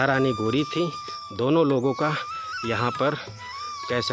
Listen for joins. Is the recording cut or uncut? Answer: uncut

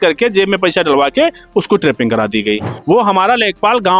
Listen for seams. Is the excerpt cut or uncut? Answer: cut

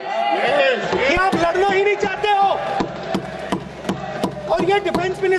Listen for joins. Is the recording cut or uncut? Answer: uncut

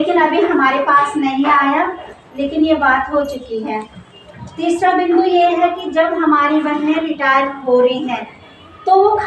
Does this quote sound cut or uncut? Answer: uncut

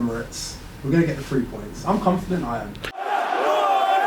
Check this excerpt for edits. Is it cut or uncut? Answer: cut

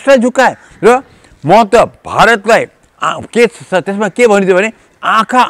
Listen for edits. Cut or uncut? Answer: uncut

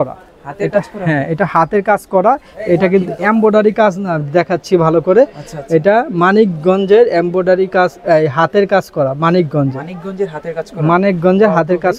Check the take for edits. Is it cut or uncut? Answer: uncut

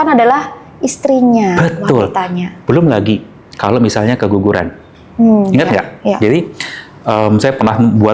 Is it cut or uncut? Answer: uncut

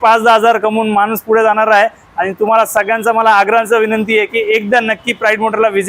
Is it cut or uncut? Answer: uncut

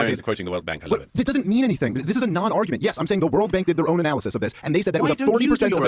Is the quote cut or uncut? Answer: uncut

